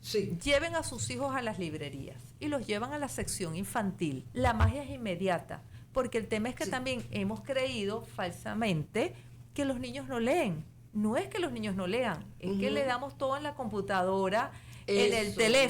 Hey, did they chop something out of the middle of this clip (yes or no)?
yes